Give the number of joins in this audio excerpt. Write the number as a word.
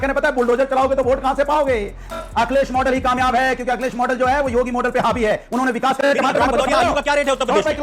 two